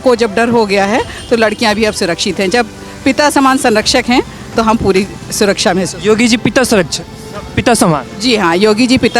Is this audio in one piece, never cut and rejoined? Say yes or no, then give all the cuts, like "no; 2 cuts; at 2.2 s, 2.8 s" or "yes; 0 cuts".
yes; 0 cuts